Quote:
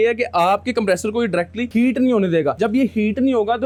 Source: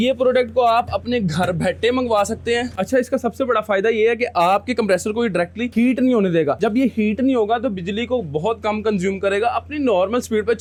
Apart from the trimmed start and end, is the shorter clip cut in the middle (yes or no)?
no